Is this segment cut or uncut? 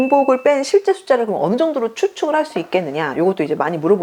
uncut